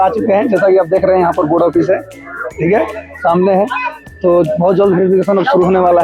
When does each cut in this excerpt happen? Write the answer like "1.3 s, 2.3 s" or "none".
none